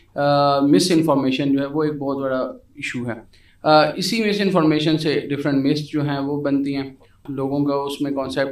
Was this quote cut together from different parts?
yes; 1 cut; at 7.2 s

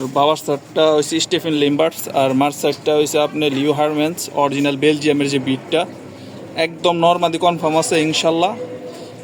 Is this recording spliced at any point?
no; 0 cuts

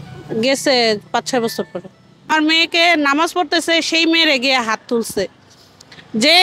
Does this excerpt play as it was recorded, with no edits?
no; 1 cut; at 2.3 s

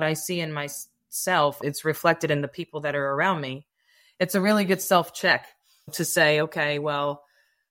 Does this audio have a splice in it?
yes; 2 cuts; at 1.6 s, 5.9 s

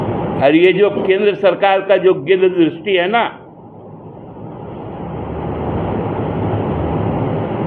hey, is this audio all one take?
yes; 0 cuts

